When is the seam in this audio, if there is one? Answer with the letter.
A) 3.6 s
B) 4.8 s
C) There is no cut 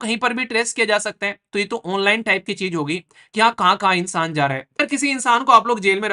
B